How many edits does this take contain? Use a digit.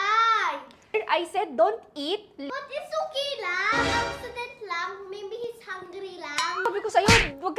3